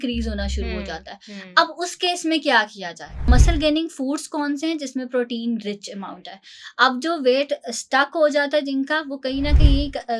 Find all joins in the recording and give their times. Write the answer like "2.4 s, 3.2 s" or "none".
3.3 s